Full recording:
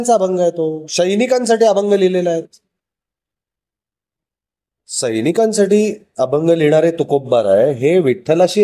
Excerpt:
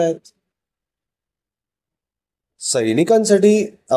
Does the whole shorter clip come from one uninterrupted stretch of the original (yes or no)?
yes